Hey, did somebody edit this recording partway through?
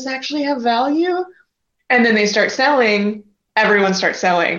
no; 0 cuts

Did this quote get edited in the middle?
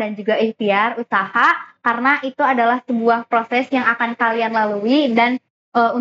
no; 0 cuts

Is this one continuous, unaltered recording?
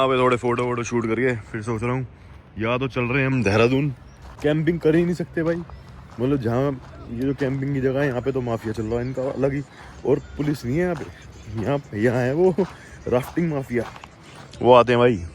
no; 1 cut; at 4.4 s

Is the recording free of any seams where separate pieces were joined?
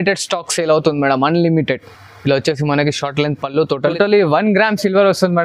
no; 1 cut; at 3.9 s

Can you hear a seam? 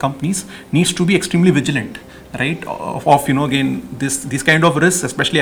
no; 0 cuts

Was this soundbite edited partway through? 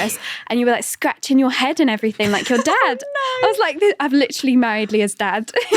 no; 0 cuts

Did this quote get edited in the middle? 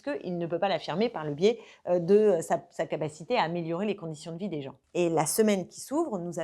yes; 1 cut; at 4.8 s

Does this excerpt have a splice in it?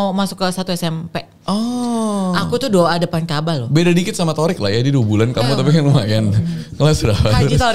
no; 0 cuts

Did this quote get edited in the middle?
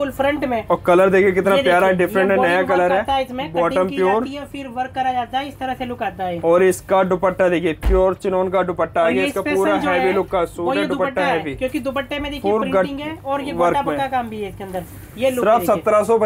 no; 0 cuts

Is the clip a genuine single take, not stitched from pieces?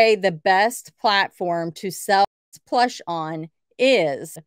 no; 1 cut; at 2.3 s

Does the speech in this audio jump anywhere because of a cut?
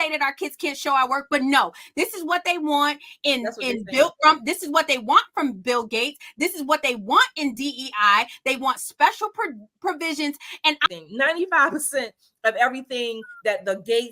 yes; 1 cut; at 10.8 s

